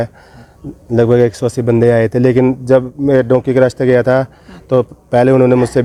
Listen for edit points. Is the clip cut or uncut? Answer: uncut